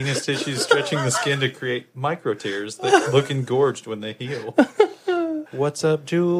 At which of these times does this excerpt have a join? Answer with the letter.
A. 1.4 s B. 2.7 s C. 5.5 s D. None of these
C